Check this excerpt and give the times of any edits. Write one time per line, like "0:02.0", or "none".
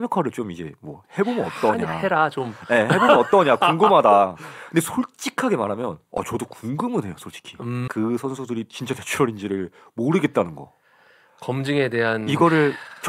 0:07.9